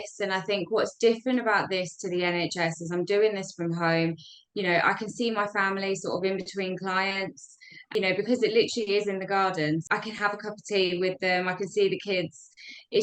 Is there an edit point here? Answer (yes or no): yes